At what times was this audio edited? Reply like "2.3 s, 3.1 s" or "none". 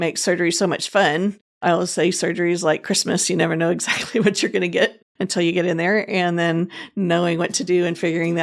1.5 s